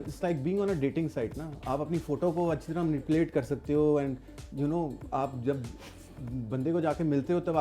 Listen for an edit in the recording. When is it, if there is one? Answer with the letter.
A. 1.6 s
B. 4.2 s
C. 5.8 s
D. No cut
D